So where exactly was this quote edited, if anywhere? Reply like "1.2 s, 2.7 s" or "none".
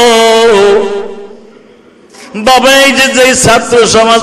2.3 s

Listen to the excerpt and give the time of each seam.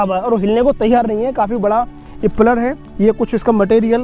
none

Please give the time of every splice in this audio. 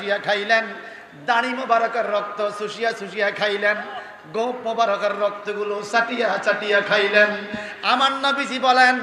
none

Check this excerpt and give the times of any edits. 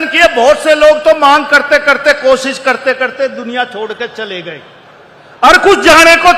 none

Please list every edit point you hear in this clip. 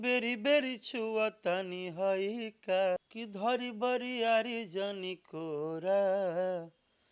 3.1 s

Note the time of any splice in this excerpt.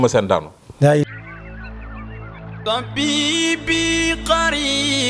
1.0 s

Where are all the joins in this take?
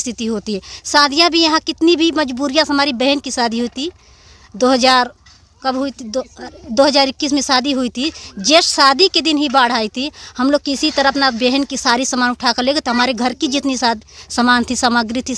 none

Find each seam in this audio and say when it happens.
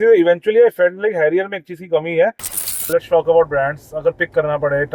2.8 s

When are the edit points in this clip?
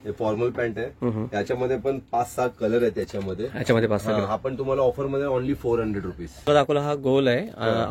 6.7 s

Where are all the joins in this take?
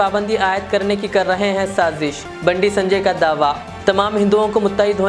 none

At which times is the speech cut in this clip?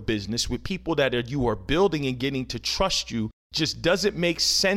3.4 s

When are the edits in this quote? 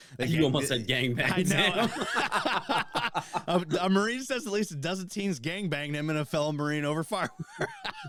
none

